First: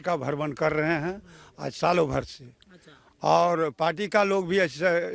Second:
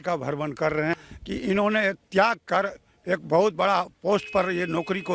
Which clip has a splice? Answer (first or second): second